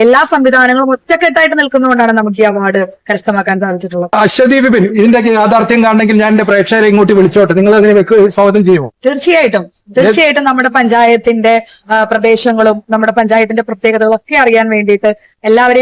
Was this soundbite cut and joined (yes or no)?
yes